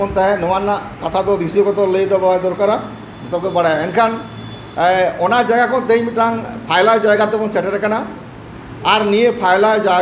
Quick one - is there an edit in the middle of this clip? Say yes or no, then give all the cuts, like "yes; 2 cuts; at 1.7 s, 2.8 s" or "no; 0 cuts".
no; 0 cuts